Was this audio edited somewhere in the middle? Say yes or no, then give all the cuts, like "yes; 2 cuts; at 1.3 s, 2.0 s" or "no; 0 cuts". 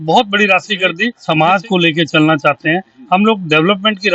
yes; 1 cut; at 1.1 s